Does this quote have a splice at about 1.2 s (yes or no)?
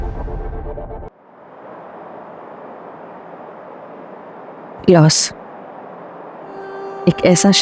yes